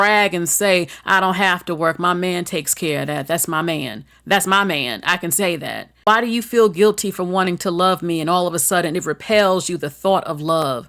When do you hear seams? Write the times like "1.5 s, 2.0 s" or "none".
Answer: 5.9 s